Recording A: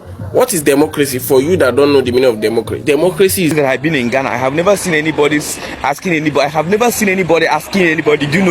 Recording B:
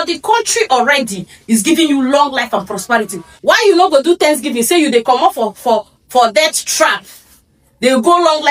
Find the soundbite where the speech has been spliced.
A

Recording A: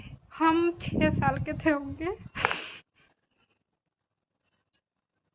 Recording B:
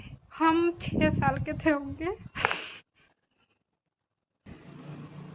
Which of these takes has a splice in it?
B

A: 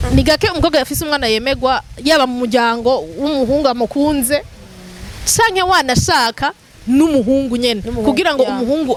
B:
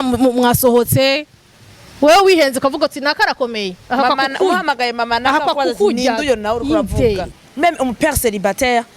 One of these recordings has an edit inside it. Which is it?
B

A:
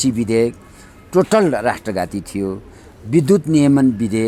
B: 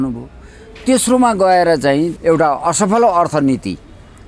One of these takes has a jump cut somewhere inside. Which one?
B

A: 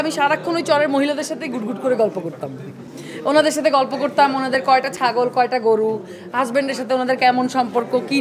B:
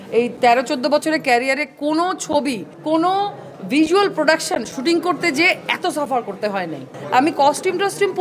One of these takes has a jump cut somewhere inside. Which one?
B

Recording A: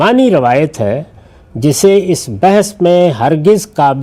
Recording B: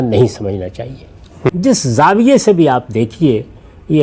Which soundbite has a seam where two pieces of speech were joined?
B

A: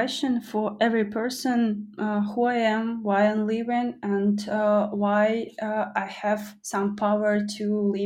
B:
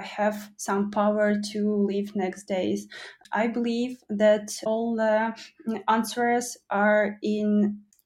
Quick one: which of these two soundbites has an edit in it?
B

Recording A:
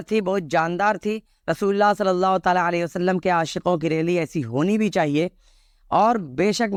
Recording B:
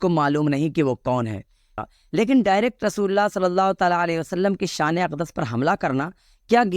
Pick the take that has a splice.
B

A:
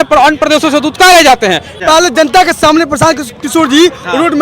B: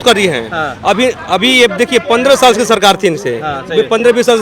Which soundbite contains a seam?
A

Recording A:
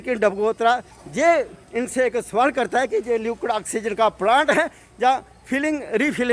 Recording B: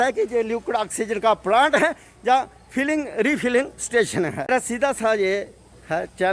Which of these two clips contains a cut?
B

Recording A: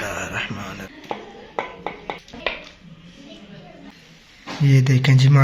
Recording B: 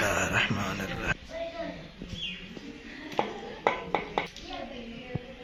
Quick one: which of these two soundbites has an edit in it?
A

